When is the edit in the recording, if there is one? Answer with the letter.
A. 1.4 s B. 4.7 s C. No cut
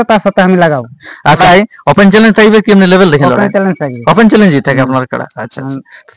A